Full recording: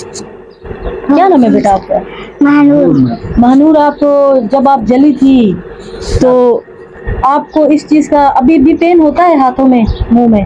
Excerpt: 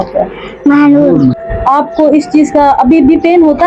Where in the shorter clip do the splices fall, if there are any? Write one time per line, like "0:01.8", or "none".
0:01.5

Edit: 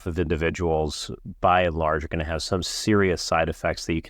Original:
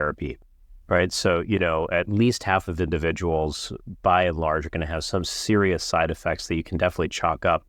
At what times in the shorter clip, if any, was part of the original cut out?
none

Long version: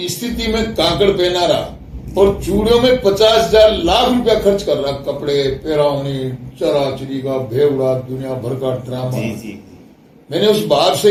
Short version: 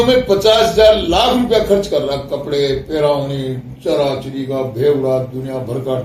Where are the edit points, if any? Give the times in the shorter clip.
none

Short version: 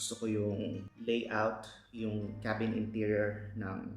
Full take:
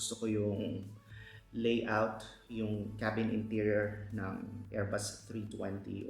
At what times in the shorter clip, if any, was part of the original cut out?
0:00.9

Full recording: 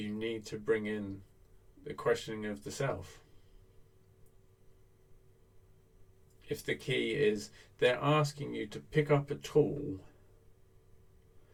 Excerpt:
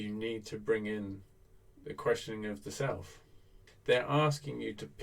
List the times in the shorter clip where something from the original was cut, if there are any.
0:03.6

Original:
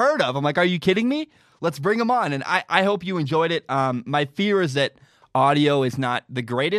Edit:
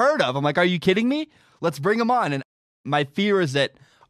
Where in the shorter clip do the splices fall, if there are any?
0:02.7

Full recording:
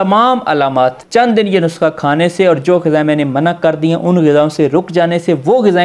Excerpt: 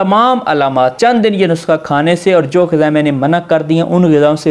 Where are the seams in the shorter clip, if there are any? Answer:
0:00.9

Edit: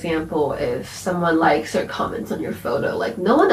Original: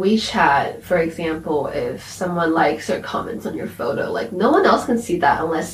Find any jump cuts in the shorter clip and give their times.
none

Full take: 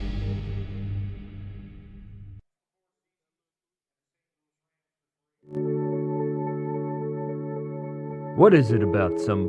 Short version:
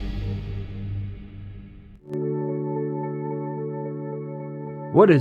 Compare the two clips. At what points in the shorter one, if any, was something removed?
0:01.9

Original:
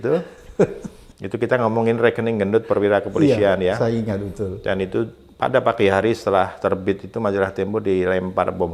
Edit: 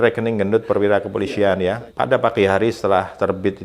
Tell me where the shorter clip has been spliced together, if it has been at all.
0:01.8

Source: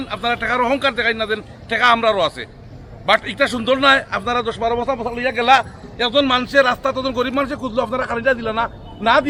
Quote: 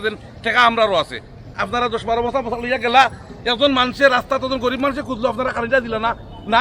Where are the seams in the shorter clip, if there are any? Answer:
0:01.6

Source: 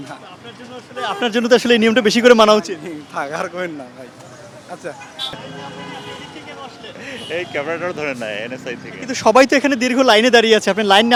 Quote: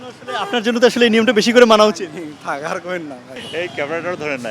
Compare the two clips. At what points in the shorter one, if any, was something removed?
0:03.4

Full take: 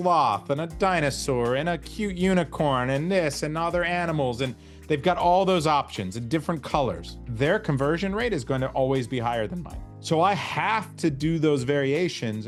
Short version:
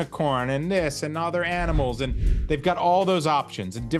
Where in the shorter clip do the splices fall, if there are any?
none

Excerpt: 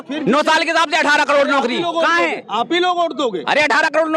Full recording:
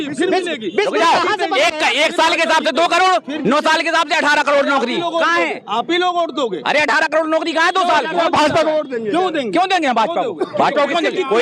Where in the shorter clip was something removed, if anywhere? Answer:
none

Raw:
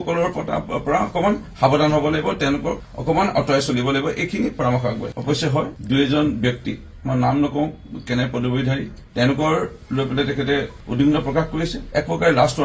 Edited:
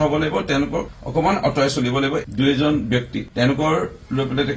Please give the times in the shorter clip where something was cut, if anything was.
0:02.3
0:03.2

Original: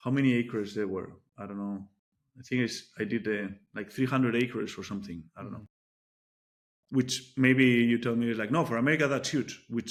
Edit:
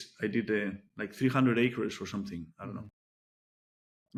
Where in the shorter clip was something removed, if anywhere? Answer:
none

